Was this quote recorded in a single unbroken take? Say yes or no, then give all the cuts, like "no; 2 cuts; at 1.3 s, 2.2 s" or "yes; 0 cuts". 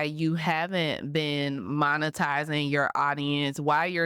yes; 0 cuts